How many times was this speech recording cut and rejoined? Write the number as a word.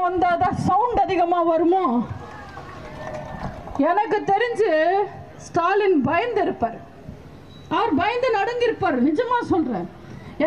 zero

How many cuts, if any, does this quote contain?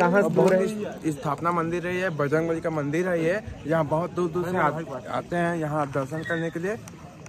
zero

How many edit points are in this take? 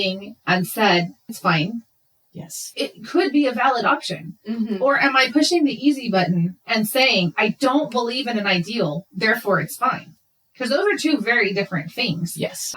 two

